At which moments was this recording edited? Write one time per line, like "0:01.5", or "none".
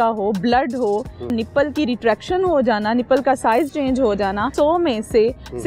0:01.3
0:04.5